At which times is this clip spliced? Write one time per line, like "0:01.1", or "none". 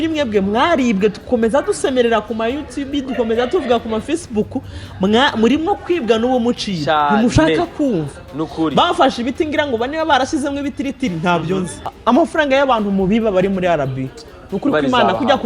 0:11.8